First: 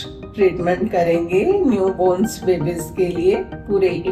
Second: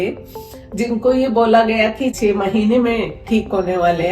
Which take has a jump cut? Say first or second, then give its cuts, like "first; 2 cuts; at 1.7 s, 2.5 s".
second; 1 cut; at 2.2 s